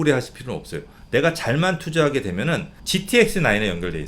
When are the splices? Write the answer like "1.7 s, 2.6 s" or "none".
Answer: 2.7 s